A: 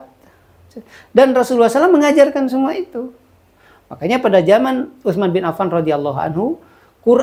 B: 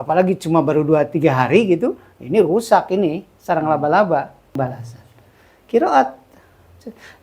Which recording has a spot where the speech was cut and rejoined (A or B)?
B